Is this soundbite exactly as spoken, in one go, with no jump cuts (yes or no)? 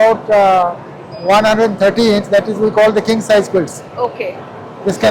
yes